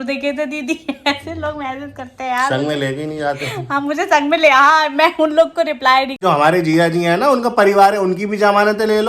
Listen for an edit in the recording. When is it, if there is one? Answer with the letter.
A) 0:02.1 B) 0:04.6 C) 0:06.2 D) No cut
C